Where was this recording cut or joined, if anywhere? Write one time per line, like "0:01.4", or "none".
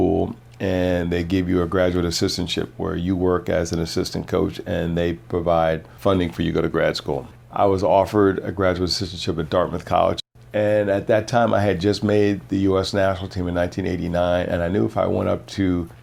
none